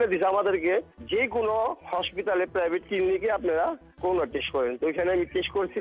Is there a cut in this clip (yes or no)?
yes